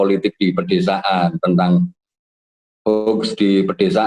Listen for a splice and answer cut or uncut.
uncut